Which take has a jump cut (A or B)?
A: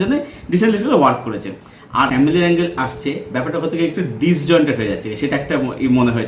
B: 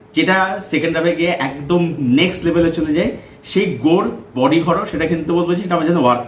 A